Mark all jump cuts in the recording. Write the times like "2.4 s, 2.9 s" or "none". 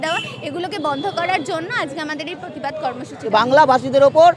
3.3 s

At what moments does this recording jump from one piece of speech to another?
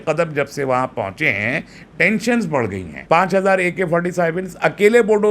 2.9 s

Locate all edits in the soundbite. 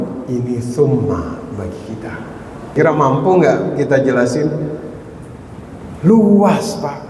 2.7 s

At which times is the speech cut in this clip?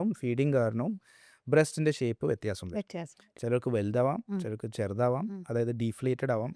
none

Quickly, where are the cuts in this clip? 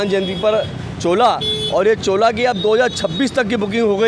none

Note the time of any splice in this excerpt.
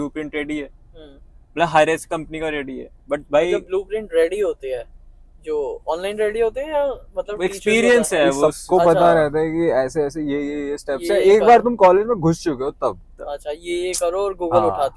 none

